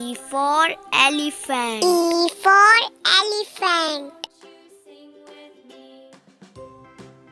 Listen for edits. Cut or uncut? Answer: cut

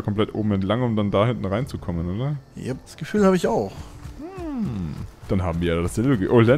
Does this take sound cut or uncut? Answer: cut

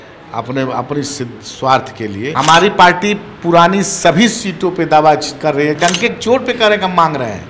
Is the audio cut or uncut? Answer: cut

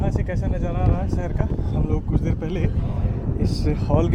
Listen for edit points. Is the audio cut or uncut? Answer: uncut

